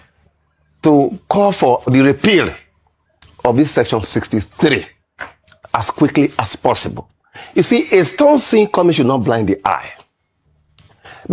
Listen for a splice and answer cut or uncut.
cut